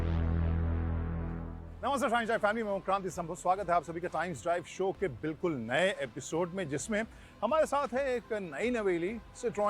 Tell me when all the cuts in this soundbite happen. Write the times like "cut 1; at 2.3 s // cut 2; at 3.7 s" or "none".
cut 1; at 2.1 s